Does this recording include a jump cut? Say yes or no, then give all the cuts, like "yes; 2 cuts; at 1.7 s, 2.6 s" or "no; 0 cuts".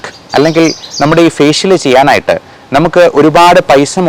no; 0 cuts